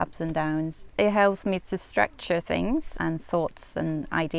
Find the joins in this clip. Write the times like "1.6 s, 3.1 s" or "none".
0.9 s, 2.9 s